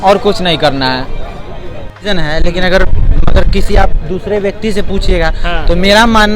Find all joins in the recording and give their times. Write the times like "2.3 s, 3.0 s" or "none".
2.0 s